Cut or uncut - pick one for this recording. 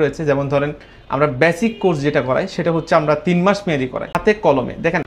cut